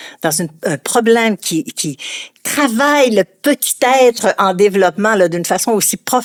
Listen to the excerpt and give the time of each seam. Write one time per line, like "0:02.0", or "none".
none